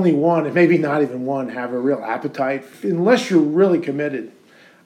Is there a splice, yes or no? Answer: yes